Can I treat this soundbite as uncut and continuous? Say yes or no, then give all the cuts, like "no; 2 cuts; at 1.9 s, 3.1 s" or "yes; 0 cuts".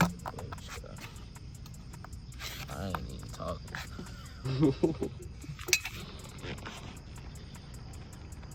yes; 0 cuts